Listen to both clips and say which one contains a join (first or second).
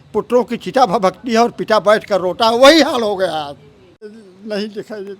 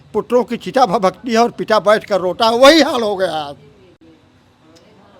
first